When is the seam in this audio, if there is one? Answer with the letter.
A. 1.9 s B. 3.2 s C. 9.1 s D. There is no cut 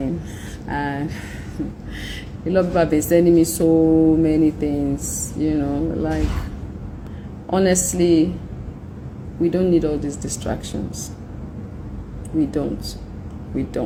D